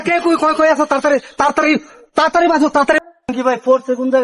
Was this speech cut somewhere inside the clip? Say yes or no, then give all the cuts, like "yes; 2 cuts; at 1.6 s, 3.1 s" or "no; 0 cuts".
yes; 1 cut; at 3.0 s